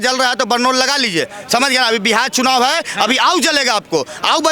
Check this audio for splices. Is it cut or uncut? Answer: uncut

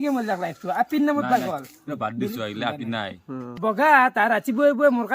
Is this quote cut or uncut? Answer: cut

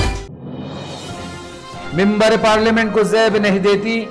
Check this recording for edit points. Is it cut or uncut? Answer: uncut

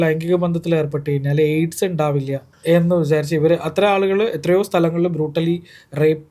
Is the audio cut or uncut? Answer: cut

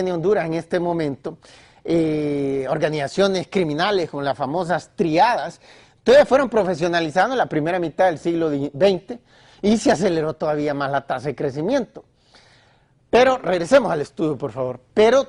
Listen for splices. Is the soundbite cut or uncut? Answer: cut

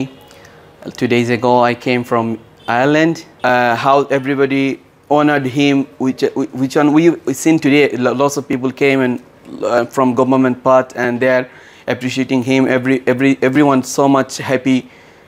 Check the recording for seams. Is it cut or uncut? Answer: cut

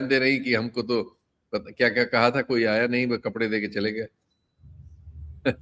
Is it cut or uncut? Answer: uncut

